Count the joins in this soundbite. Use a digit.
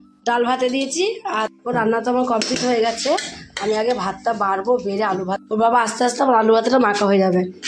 2